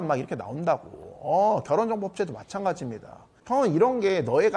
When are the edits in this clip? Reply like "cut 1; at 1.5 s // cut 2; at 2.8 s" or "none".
none